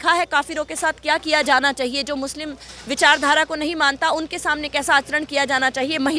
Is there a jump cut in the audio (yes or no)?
no